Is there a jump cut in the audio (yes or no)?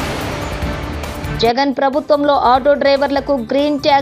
no